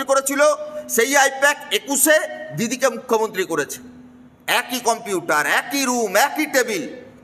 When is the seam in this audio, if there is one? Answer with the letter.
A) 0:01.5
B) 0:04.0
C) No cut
C